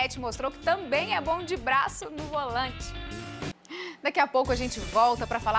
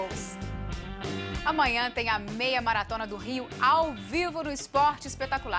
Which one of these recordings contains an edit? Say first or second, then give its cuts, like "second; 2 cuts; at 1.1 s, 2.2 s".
second; 1 cut; at 0.9 s